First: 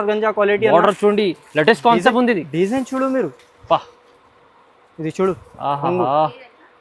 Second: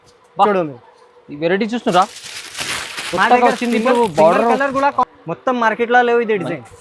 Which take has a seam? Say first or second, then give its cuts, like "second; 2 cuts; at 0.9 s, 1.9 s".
second; 1 cut; at 5.1 s